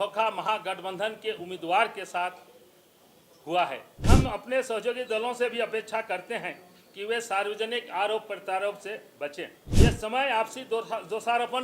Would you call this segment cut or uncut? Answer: cut